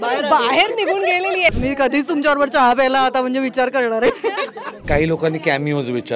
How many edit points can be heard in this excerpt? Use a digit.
2